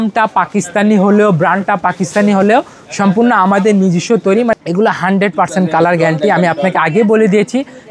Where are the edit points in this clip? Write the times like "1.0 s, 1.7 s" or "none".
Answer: 4.5 s